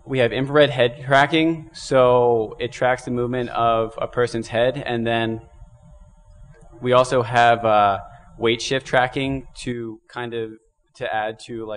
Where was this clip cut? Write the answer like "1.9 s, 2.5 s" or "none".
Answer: 1.2 s